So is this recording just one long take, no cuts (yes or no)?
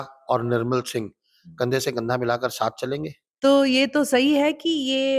no